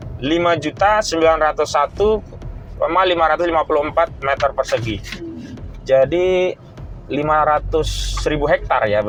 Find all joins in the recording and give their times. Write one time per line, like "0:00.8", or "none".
none